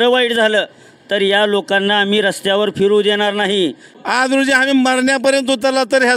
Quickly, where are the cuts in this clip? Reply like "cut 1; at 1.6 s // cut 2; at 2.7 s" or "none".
cut 1; at 3.9 s